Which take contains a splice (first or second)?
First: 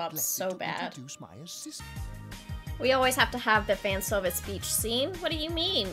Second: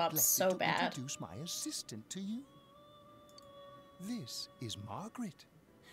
first